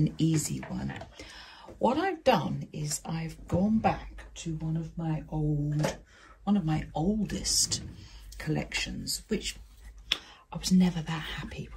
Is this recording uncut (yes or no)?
yes